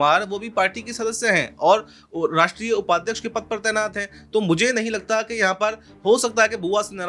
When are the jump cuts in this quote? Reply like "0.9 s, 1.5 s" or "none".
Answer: none